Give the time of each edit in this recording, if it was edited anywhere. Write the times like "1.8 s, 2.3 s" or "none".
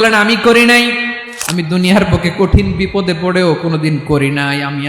1.2 s